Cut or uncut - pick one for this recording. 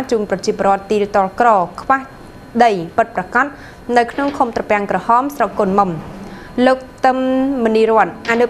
uncut